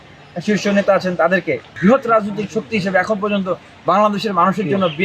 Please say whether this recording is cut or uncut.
cut